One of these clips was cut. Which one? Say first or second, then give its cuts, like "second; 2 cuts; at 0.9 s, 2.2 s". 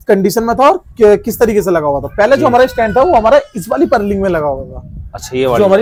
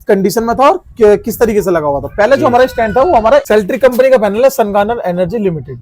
second; 1 cut; at 3.5 s